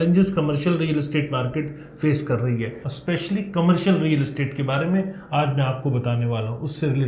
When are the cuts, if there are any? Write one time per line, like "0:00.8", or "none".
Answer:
0:02.8